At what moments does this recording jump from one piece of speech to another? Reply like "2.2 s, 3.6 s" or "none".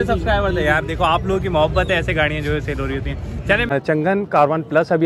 3.7 s